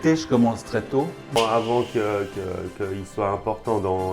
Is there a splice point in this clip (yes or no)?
yes